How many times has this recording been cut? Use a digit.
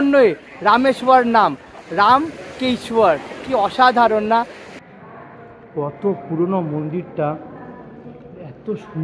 1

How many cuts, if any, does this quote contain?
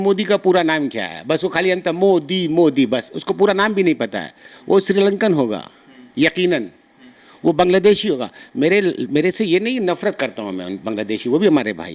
0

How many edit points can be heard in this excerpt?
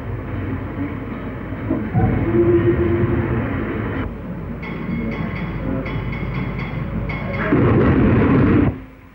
0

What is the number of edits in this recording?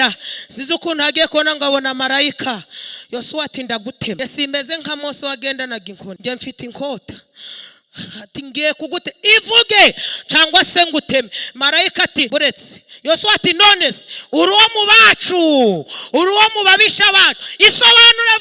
3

